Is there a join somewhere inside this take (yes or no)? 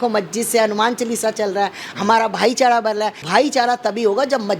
yes